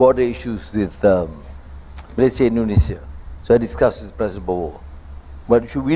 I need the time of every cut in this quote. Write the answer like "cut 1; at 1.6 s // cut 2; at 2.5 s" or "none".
none